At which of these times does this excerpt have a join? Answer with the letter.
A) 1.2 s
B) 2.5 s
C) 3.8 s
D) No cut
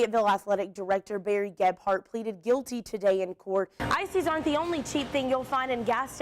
C